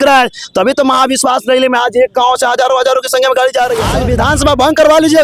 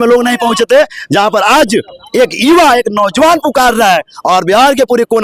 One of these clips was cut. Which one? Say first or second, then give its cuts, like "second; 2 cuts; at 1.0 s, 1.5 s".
first; 1 cut; at 3.9 s